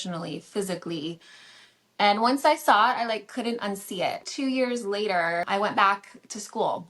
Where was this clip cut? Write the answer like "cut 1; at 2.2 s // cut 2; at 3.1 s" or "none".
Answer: cut 1; at 4.3 s // cut 2; at 5.5 s